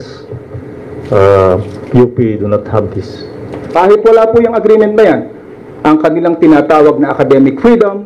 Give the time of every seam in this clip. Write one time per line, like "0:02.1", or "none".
0:03.7